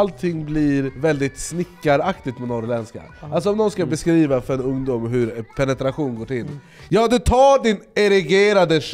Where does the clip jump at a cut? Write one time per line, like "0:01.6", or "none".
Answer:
0:00.9